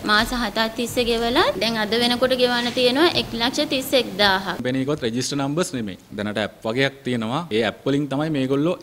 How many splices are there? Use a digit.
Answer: 3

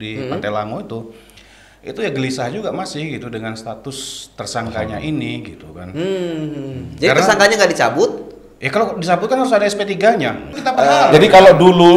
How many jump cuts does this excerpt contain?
1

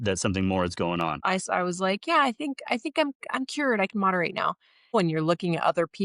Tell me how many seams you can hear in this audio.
2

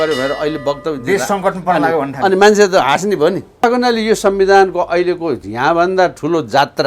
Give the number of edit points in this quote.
1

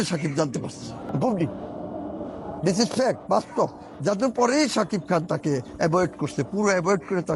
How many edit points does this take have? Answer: 1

